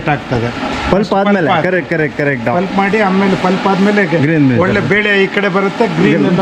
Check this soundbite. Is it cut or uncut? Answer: uncut